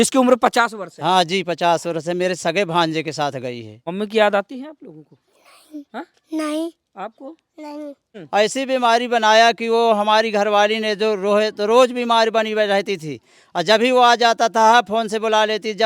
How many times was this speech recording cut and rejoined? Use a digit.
2